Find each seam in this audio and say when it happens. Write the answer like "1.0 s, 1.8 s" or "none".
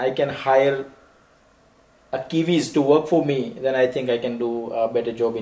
none